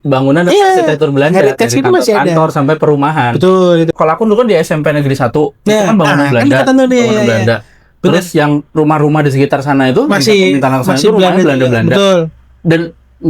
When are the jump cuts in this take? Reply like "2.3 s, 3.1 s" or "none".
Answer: 3.9 s